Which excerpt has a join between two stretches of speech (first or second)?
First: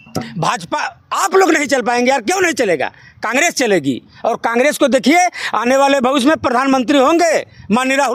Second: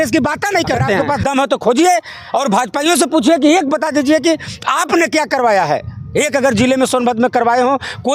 second